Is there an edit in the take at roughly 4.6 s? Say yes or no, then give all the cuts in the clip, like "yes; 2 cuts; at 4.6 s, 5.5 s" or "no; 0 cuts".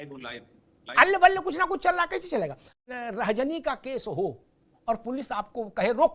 no; 1 cut; at 2.7 s